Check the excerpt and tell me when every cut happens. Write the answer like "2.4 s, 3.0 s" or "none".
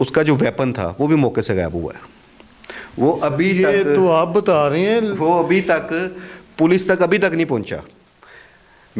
none

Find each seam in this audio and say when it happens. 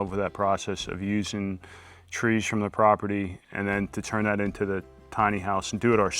3.4 s

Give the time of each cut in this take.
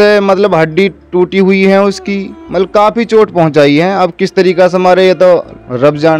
none

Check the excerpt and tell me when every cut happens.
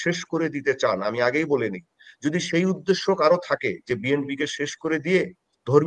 none

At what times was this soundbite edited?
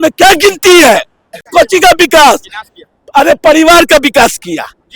1.5 s

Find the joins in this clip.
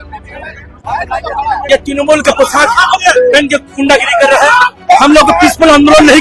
1.6 s

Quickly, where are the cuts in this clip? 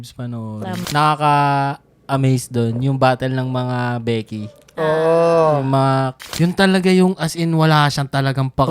0.8 s, 6.2 s

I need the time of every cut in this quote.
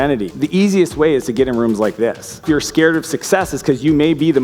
2.4 s

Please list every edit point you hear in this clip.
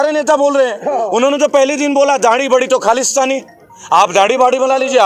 none

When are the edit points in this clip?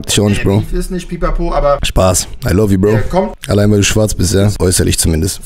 1.9 s, 3.4 s, 4.5 s

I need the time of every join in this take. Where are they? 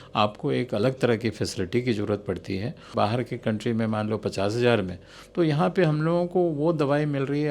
2.9 s

